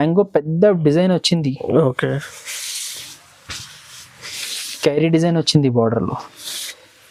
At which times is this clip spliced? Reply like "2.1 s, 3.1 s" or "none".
none